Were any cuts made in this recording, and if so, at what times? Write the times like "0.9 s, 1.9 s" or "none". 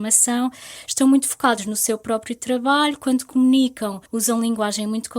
4.0 s